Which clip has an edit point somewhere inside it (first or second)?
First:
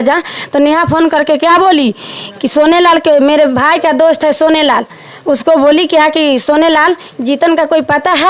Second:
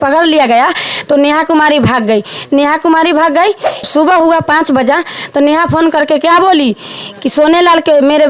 second